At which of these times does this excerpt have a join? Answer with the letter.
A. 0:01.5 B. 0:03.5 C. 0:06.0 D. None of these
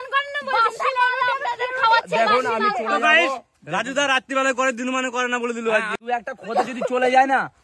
C